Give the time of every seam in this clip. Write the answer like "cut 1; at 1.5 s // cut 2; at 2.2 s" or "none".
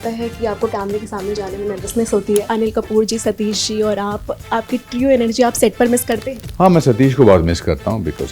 cut 1; at 2.5 s // cut 2; at 6.4 s